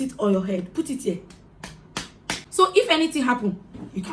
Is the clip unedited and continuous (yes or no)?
no